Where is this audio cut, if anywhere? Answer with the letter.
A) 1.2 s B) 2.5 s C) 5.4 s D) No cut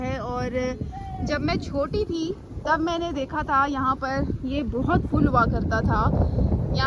D